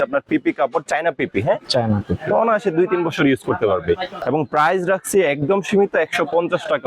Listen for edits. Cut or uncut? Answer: cut